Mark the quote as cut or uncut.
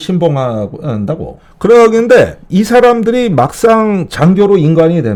uncut